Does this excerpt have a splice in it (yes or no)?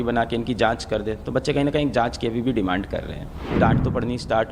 yes